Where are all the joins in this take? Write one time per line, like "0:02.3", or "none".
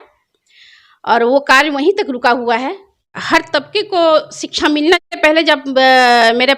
0:03.2
0:05.1